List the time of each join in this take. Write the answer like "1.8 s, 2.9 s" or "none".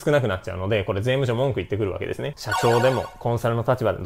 2.3 s